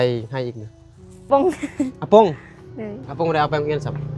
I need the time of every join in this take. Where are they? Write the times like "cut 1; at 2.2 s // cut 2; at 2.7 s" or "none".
cut 1; at 1.2 s